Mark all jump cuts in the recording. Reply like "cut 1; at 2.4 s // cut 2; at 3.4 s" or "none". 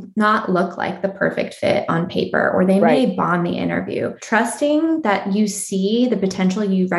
cut 1; at 4.2 s